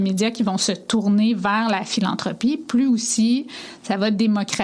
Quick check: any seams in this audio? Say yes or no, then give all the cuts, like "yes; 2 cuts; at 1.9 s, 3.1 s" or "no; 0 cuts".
no; 0 cuts